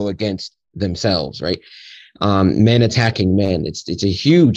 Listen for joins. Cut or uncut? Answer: uncut